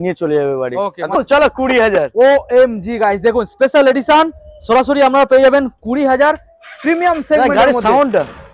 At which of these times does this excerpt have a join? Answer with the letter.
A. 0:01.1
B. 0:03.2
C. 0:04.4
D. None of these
A